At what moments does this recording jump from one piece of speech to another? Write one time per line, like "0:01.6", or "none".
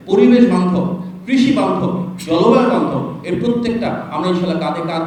none